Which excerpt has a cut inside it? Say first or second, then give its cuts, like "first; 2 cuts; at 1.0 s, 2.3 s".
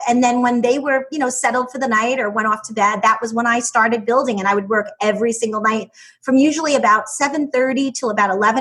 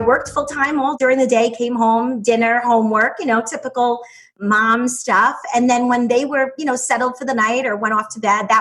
second; 2 cuts; at 0.9 s, 4.4 s